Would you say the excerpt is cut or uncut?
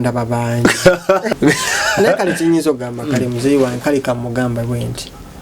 cut